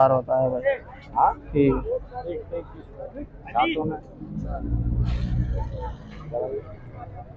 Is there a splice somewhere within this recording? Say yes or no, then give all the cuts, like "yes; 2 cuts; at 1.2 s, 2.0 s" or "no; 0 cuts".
no; 0 cuts